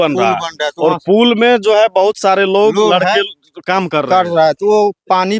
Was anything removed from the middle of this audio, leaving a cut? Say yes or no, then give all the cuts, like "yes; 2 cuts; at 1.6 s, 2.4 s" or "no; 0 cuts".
no; 0 cuts